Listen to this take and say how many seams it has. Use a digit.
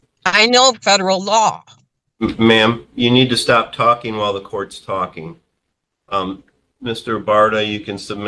0